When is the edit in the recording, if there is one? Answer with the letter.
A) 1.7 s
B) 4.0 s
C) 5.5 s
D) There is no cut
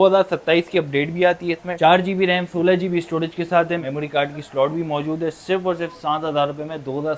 A